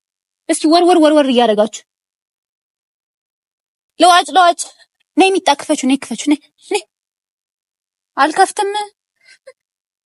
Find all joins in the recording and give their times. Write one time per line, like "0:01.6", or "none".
none

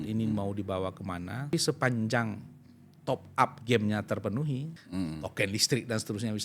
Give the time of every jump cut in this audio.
0:01.5
0:04.8

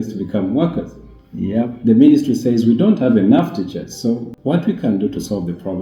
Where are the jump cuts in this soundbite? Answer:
0:04.3

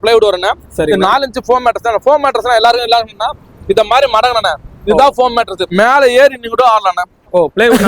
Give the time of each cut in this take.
0:05.6

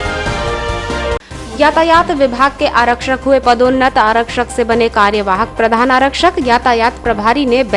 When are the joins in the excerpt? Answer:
0:01.2

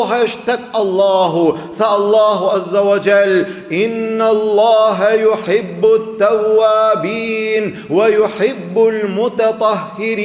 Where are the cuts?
none

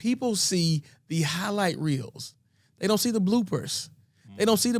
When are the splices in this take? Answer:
none

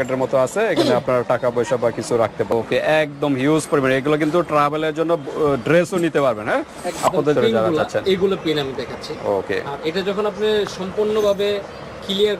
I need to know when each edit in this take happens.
0:02.5
0:07.4

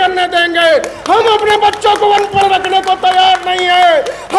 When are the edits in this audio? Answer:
none

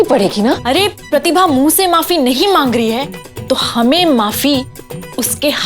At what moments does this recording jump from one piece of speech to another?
0:01.1

